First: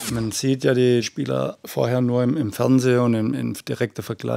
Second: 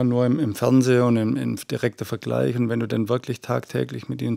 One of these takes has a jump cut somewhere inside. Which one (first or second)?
first